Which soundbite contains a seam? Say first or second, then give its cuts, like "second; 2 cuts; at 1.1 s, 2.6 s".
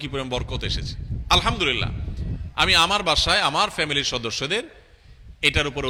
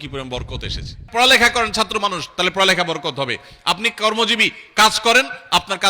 second; 1 cut; at 1.1 s